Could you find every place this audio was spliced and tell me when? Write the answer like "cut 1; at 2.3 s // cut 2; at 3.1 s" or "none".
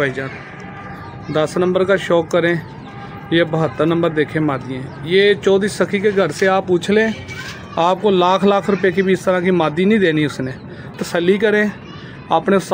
cut 1; at 11.0 s